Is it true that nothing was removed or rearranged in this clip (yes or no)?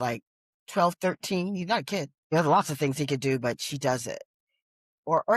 no